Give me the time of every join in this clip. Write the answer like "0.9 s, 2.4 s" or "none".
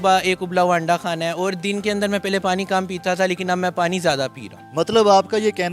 none